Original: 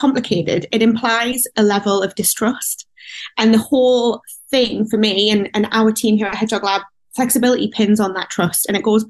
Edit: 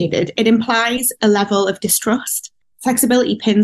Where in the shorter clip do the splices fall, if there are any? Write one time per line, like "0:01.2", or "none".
0:02.6